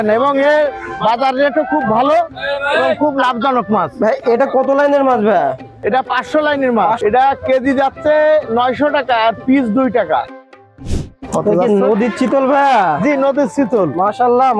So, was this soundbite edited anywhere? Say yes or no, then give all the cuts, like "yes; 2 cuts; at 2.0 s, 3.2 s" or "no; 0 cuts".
yes; 2 cuts; at 7.0 s, 10.3 s